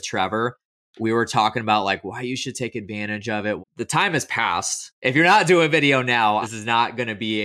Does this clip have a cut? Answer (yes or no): yes